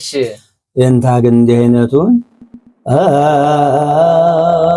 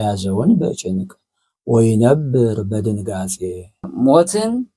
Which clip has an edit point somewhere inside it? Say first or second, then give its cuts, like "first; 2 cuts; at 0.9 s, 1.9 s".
second; 1 cut; at 3.8 s